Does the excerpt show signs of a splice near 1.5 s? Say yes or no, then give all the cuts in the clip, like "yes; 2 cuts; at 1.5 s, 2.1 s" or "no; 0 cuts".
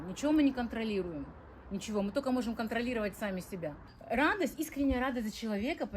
no; 1 cut; at 3.9 s